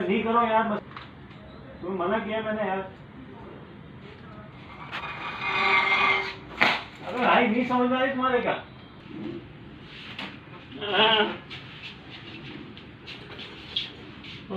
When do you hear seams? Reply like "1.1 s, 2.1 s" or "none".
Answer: 4.5 s, 9.0 s